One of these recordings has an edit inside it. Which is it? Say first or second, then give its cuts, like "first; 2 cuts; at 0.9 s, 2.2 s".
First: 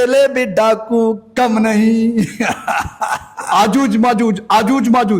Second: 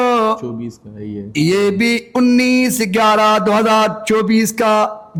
first; 1 cut; at 3.4 s